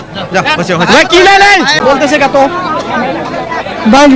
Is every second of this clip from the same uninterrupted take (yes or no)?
no